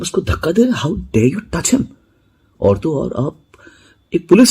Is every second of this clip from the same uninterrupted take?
yes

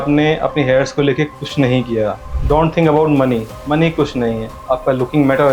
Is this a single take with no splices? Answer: no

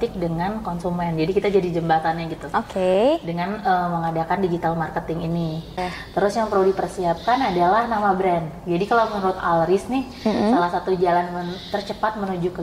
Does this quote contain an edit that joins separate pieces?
yes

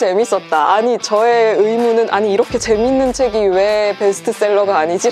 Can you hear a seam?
no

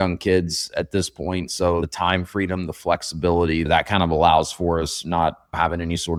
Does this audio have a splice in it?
no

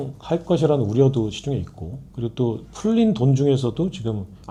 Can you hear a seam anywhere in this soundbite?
no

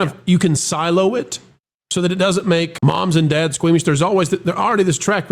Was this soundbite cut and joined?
yes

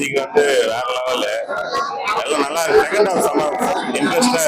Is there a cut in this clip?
no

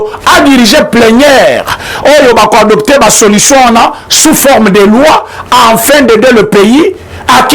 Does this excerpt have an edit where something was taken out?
no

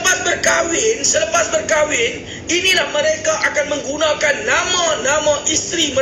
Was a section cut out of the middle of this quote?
no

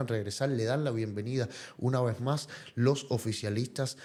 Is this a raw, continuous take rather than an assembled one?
yes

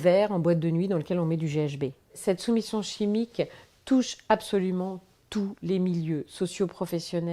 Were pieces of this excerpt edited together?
yes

